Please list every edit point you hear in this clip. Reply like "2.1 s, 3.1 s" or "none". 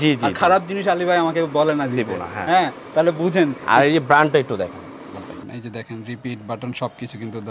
5.4 s